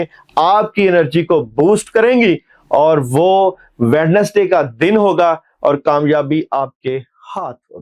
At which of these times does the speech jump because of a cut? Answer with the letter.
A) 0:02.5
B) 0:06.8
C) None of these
C